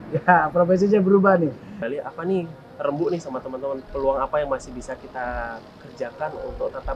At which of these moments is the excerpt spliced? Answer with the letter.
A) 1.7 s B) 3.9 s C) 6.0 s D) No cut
A